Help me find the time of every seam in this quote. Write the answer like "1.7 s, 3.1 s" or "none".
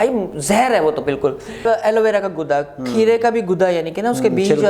1.6 s